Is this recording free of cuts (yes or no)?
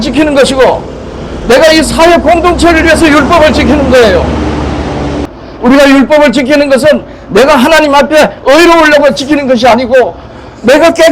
no